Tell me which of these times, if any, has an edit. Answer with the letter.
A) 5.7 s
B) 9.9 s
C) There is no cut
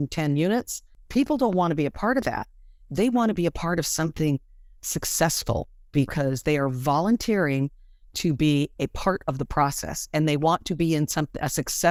C